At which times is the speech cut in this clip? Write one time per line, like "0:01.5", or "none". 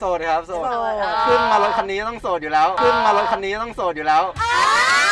none